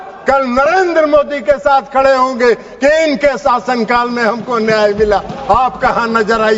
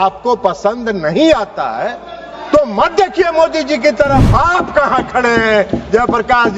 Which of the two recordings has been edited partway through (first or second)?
second